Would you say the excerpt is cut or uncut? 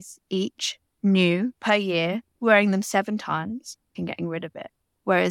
cut